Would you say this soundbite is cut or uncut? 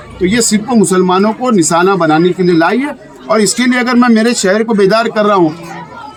uncut